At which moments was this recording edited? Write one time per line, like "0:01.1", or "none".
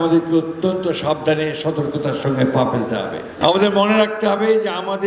0:03.3

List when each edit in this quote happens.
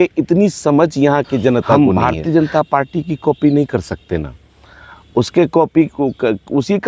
0:01.8

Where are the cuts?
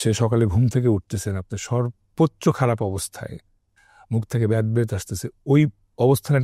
none

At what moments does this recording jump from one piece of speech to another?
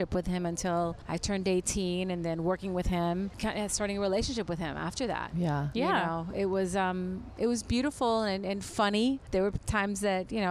0:01.1
0:03.4
0:09.2

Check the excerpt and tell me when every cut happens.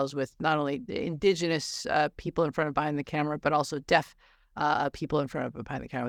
none

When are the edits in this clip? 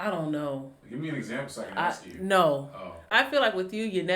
0:03.1

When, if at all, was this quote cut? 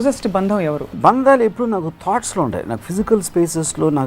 0:00.9

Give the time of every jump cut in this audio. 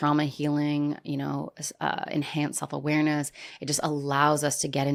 none

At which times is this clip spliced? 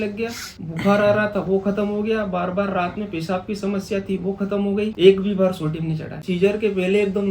0:04.9
0:06.3

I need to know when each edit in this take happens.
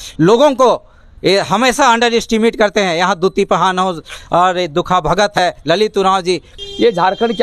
0:06.5

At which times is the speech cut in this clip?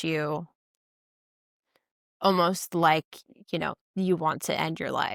none

